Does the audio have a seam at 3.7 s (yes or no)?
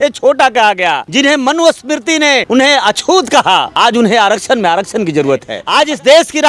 yes